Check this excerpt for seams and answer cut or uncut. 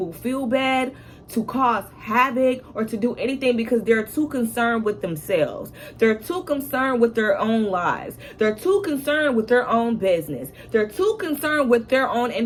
uncut